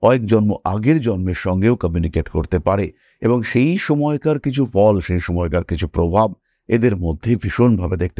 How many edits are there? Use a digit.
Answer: 0